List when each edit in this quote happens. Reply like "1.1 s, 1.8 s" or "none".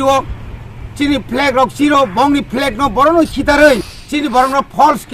4.0 s